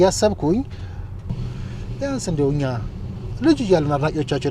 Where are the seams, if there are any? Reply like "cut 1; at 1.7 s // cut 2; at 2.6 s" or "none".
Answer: cut 1; at 1.4 s